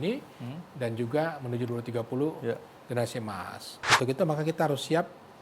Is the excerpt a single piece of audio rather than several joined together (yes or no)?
no